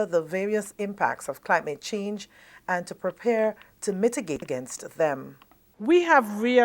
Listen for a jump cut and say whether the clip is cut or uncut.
cut